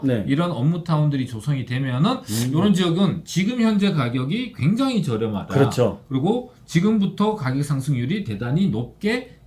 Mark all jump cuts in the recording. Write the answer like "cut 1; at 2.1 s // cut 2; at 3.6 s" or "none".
none